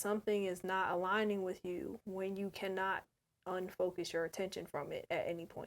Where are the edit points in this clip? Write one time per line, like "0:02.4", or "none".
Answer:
0:02.0